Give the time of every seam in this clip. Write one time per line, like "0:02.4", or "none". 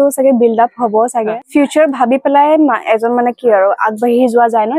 0:01.4